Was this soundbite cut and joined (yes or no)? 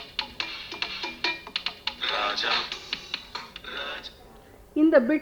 no